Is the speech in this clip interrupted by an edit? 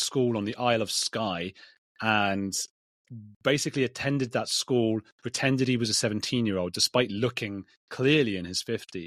no; 0 cuts

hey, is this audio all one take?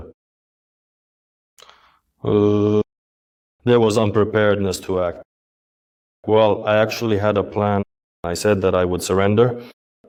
yes; 0 cuts

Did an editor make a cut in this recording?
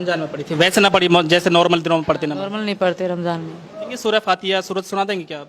yes; 1 cut; at 3.9 s

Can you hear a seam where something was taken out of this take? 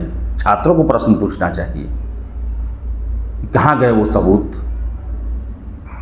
no; 0 cuts

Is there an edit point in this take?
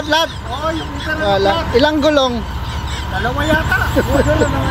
no; 0 cuts

